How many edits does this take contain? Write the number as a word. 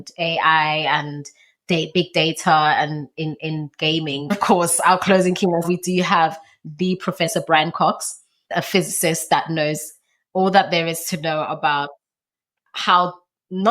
three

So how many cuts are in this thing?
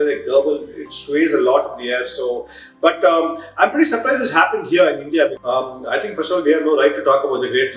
one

